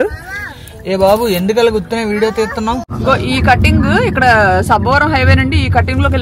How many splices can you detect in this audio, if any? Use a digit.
1